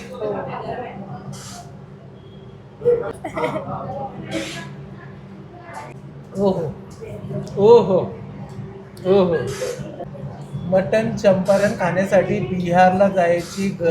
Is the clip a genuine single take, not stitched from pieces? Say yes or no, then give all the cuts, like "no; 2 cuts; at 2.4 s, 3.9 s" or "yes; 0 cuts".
no; 3 cuts; at 3.1 s, 5.9 s, 10.0 s